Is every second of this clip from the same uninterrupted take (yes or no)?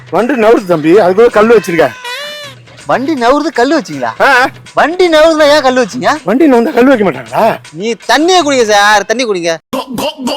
no